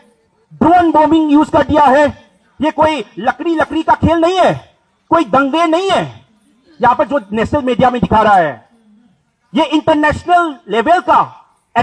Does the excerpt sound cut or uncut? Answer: uncut